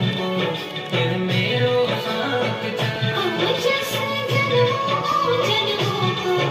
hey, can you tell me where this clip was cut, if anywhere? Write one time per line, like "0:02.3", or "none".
none